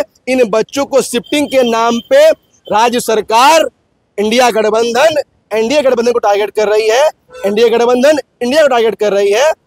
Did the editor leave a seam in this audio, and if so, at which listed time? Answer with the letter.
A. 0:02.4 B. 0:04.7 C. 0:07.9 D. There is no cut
D